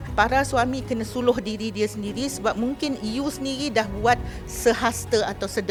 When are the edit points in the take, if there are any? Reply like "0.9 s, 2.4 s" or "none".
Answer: none